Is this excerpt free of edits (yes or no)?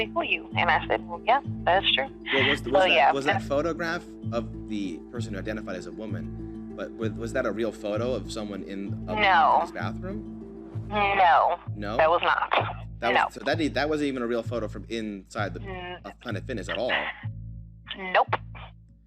yes